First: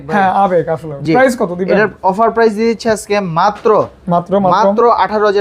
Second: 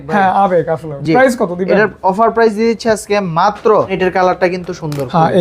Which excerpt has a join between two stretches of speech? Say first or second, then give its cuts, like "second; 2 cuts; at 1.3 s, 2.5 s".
second; 1 cut; at 4.0 s